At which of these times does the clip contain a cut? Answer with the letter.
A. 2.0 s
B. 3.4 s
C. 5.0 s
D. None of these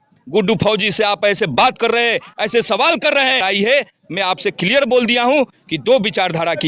B